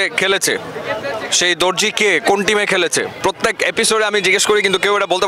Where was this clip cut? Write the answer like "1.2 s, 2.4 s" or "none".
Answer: 3.1 s